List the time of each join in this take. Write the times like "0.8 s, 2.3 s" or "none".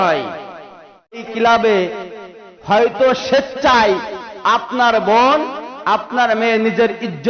1.2 s